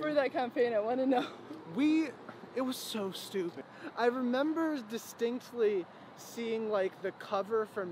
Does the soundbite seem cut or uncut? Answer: cut